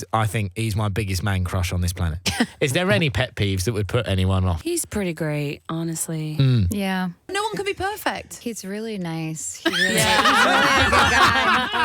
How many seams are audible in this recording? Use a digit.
4